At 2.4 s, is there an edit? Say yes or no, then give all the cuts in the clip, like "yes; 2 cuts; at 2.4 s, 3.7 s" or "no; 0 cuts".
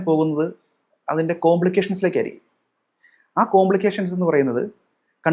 no; 0 cuts